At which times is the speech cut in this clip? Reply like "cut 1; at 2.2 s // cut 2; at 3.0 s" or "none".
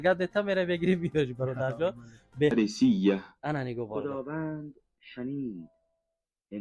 cut 1; at 2.5 s